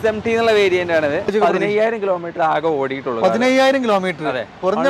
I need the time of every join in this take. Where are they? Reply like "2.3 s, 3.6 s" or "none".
1.3 s